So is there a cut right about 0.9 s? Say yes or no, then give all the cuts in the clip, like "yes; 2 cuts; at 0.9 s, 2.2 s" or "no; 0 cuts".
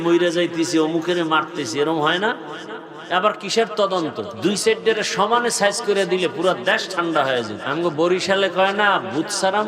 no; 2 cuts; at 4.3 s, 7.6 s